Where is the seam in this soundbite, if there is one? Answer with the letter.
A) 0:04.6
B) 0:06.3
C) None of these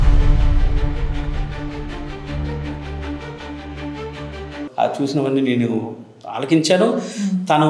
A